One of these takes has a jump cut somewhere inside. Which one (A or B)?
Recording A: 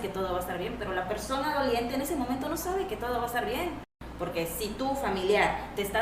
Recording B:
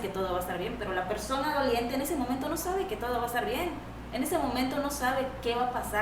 A